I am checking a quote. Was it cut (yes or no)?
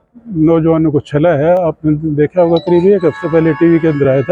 no